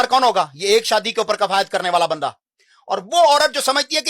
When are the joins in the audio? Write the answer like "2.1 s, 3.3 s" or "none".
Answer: none